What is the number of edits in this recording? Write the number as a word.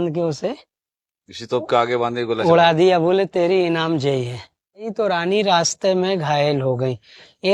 one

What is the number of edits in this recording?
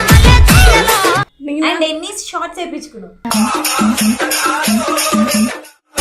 zero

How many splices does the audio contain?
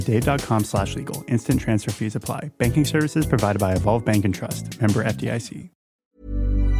one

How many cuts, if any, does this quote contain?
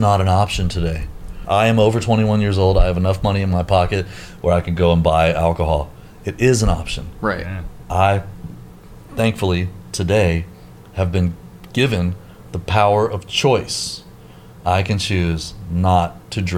one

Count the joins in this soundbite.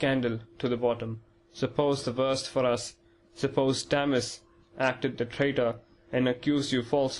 one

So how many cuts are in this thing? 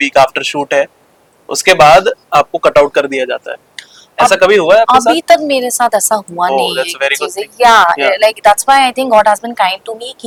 zero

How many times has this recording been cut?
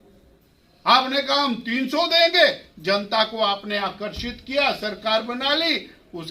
zero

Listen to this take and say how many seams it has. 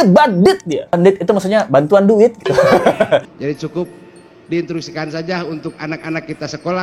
two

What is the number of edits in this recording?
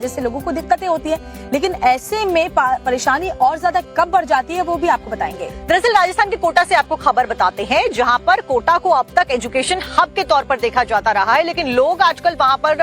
zero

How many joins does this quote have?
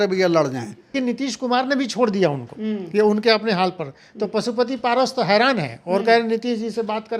one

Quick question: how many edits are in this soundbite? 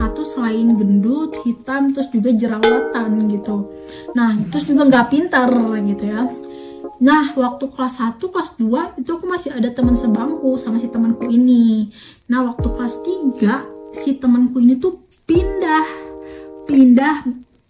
zero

